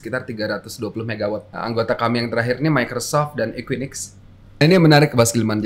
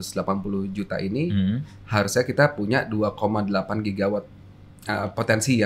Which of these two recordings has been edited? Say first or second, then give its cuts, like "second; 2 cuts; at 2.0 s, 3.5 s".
first; 2 cuts; at 1.5 s, 4.6 s